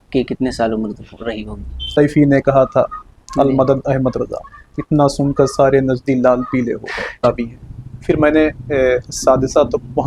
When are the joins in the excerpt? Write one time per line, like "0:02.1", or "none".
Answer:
0:01.9
0:07.2